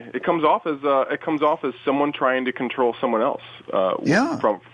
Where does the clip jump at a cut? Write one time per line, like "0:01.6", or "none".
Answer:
none